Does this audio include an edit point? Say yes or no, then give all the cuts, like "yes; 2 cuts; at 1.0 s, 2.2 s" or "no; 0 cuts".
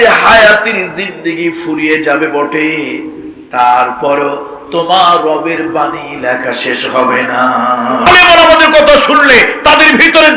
yes; 1 cut; at 8.0 s